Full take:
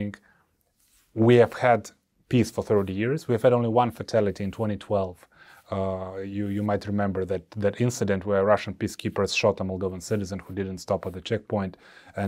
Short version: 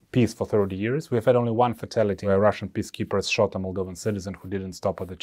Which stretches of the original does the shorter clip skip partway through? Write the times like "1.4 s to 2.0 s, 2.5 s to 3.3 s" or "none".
4.4 s to 8.3 s